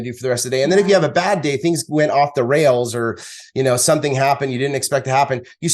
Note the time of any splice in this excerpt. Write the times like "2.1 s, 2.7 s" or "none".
none